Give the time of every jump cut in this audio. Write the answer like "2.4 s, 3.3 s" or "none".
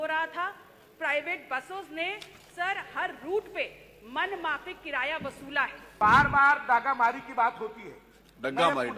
5.9 s